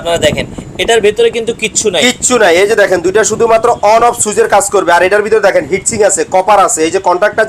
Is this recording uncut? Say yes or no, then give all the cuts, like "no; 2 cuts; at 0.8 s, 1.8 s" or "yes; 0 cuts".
yes; 0 cuts